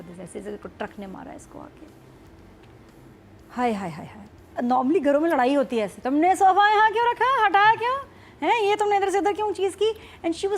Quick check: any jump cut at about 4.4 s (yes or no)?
yes